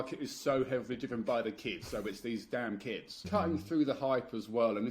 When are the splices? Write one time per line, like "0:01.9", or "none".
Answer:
0:03.2